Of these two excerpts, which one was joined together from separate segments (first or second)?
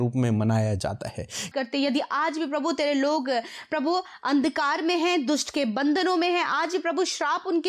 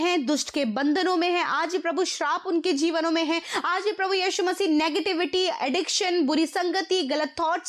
first